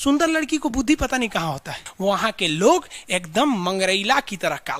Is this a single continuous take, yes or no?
no